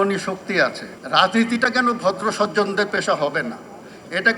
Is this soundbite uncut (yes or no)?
no